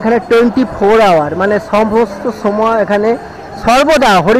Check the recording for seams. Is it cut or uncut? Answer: uncut